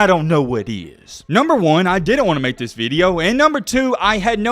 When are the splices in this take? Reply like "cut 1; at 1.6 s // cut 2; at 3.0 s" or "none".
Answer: cut 1; at 1.1 s